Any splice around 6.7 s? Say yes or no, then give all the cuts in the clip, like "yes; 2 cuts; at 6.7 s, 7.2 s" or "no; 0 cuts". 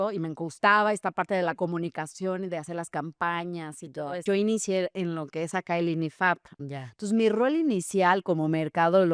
yes; 2 cuts; at 4.2 s, 6.7 s